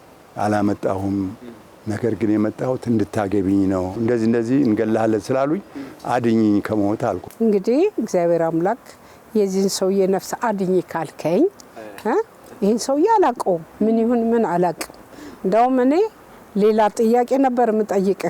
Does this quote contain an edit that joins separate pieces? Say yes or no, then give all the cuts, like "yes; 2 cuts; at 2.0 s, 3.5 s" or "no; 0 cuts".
yes; 2 cuts; at 3.9 s, 7.2 s